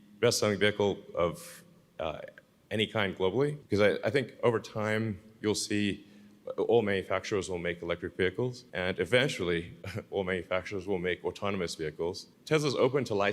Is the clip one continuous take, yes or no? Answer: no